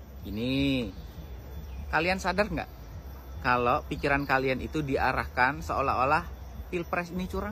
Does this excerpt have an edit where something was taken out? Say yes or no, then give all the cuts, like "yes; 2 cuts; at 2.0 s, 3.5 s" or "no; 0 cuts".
no; 0 cuts